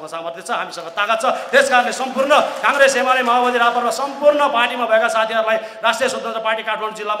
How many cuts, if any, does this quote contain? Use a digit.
0